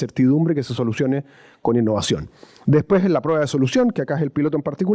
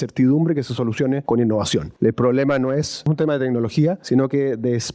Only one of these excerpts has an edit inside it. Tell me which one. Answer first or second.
second